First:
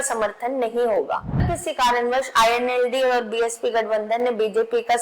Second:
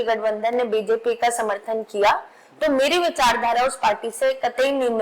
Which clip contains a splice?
first; 1 cut; at 1.5 s

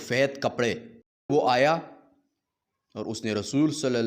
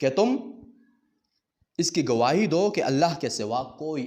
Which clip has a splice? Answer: first; 1 cut; at 1.3 s

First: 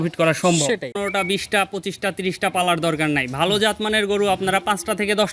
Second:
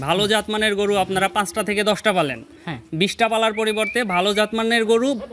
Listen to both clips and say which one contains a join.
first; 1 cut; at 1.0 s

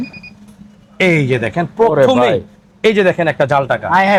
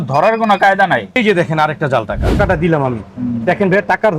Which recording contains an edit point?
second; 2 cuts; at 1.2 s, 2.4 s

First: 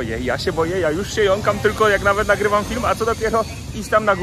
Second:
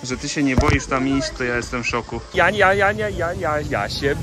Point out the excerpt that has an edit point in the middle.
second; 1 cut; at 2.3 s

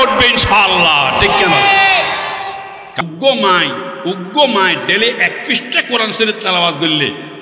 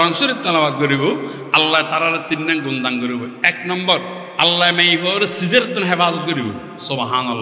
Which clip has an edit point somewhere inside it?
first; 1 cut; at 3.0 s

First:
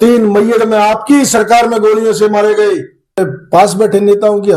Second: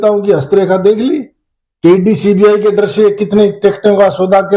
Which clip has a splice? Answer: first; 1 cut; at 3.1 s

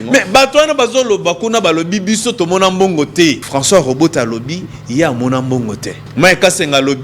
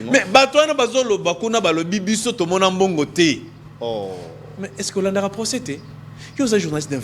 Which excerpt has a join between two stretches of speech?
first; 2 cuts; at 3.4 s, 6.0 s

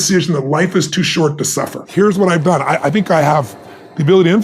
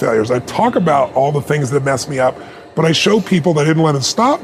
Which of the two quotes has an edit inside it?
first; 1 cut; at 1.8 s

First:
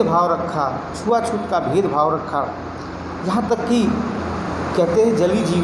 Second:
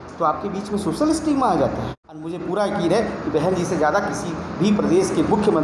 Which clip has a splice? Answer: second; 1 cut; at 2.4 s

